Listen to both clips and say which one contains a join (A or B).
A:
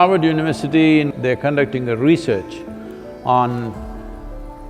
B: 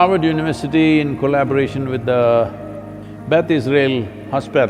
A